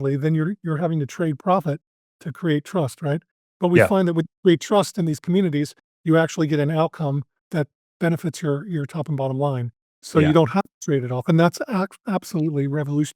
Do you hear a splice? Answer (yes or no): yes